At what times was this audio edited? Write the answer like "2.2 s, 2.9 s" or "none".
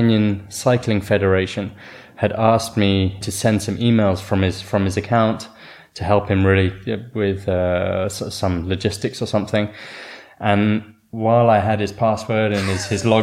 3.3 s